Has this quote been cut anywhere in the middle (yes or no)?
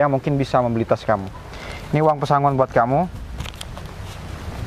no